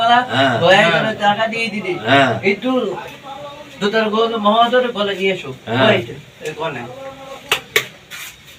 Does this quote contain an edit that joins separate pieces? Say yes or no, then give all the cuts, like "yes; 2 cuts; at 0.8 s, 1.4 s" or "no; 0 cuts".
no; 0 cuts